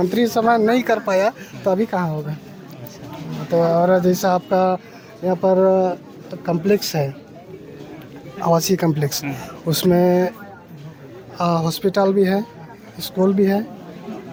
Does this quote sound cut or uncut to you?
uncut